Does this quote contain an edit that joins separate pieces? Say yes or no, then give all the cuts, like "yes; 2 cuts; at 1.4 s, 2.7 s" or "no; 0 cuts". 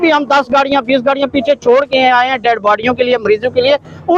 no; 0 cuts